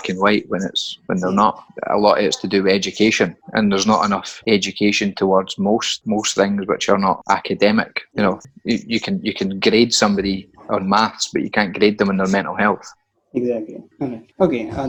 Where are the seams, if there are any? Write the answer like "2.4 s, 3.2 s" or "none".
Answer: none